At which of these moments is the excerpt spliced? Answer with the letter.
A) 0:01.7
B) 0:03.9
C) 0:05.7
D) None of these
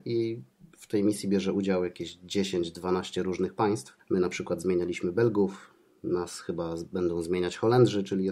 B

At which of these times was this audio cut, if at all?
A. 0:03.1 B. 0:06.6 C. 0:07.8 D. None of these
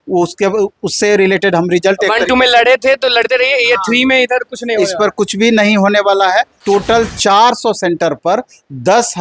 B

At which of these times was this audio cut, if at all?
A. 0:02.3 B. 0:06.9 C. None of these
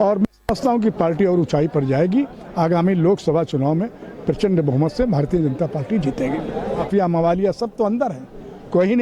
B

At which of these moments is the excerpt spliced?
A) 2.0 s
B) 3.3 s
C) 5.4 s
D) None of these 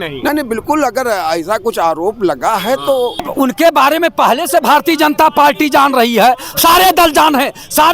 B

